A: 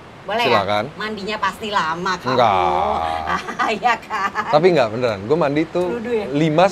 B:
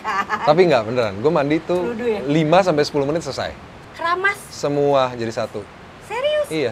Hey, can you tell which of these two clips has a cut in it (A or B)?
B